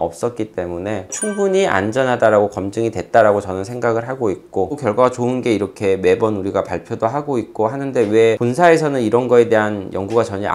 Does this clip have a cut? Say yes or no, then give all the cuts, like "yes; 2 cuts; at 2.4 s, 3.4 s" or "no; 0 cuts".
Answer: yes; 1 cut; at 4.8 s